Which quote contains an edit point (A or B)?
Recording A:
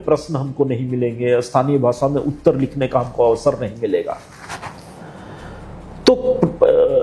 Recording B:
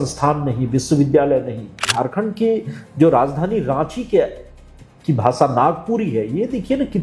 B